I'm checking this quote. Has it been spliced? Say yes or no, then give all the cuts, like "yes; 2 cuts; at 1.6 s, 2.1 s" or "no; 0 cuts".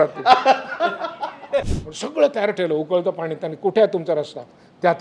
yes; 1 cut; at 1.7 s